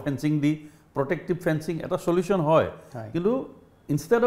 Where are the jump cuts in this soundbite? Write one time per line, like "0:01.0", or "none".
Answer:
none